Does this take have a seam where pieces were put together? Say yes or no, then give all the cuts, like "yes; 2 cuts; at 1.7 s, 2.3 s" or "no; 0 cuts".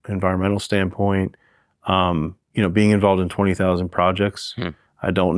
no; 0 cuts